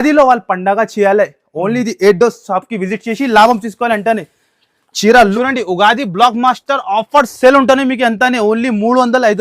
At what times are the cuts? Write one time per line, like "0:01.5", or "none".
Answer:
0:05.3